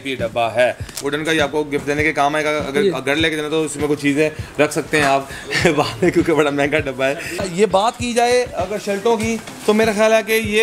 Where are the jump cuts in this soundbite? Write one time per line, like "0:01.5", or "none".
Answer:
0:01.0
0:07.5

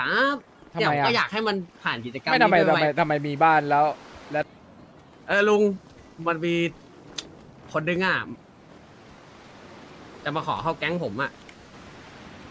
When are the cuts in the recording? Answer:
0:04.4

